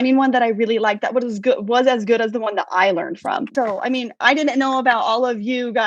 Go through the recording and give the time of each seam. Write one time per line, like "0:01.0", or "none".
0:03.5